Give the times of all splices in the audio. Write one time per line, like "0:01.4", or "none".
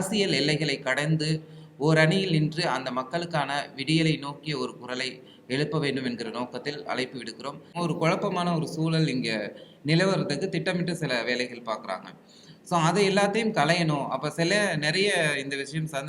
0:07.7